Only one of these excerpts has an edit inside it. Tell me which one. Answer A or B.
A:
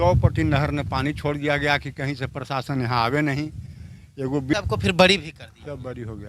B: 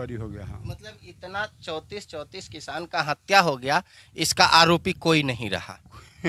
A